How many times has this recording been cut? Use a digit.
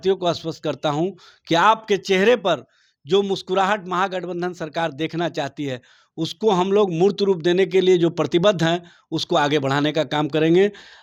0